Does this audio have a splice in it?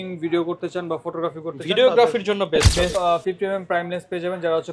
yes; 1 cut; at 2.9 s

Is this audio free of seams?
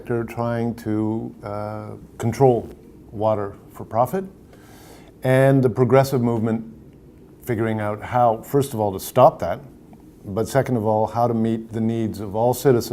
no; 1 cut; at 9.8 s

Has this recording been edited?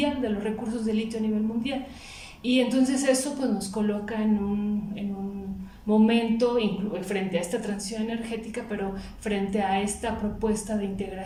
no; 0 cuts

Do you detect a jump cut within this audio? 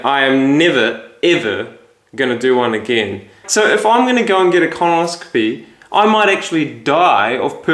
yes; 1 cut; at 3.4 s

